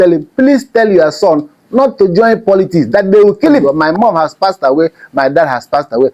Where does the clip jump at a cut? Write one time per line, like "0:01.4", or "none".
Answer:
0:03.7